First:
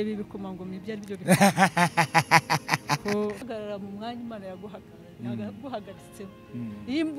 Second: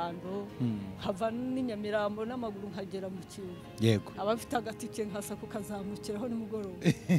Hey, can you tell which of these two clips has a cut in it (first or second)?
first